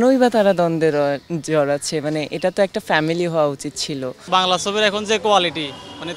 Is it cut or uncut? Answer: cut